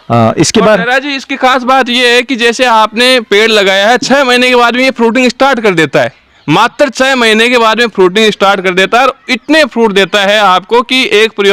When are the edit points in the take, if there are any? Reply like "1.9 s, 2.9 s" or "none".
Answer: none